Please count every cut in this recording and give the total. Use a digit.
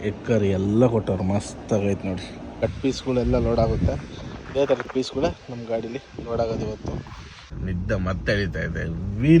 2